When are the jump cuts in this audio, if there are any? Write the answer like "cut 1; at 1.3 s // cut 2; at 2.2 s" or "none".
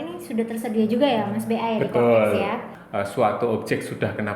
cut 1; at 2.7 s